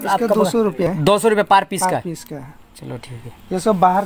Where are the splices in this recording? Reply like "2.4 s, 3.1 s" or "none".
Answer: 0.9 s